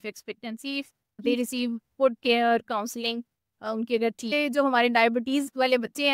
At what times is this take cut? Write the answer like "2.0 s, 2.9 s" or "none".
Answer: 1.2 s, 4.3 s